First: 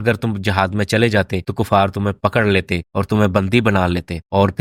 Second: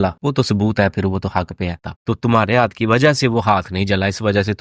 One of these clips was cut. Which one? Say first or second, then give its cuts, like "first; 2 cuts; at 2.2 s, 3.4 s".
second; 1 cut; at 1.8 s